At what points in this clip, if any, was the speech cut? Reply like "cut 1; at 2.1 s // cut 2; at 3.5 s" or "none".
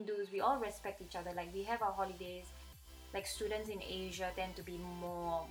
cut 1; at 2.9 s

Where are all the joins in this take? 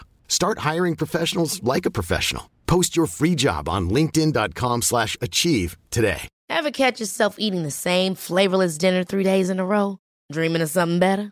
cut 1; at 6.3 s

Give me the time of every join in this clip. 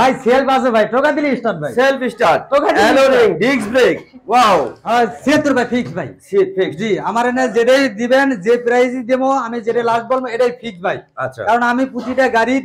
cut 1; at 4.8 s

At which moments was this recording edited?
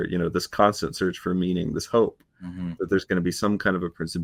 none

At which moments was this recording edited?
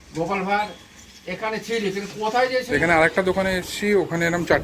cut 1; at 2.7 s

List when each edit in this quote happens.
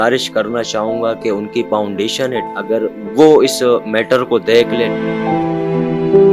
none

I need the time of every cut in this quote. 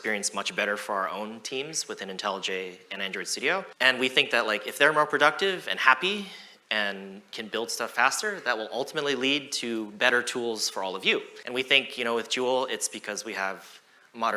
cut 1; at 3.7 s // cut 2; at 11.4 s

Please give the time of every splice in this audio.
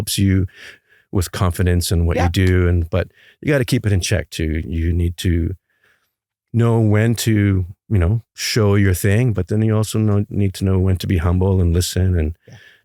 none

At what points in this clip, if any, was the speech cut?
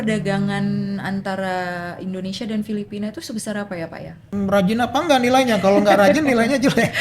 cut 1; at 4.3 s

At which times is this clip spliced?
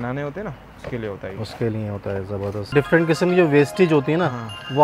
cut 1; at 2.7 s

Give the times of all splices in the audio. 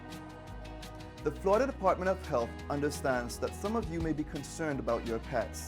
cut 1; at 1.0 s

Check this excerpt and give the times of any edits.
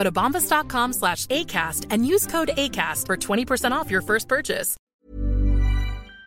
cut 1; at 4.7 s

